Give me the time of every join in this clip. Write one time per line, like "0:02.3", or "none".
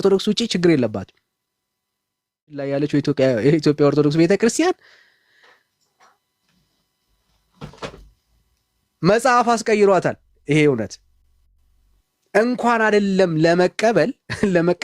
0:02.7